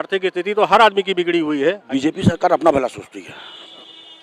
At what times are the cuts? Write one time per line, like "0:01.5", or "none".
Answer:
0:01.8